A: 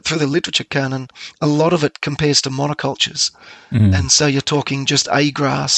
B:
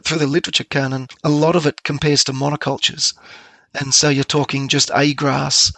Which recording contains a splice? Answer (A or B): B